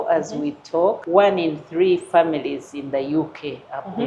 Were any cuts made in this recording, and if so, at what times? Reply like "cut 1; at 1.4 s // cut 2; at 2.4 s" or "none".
cut 1; at 1.0 s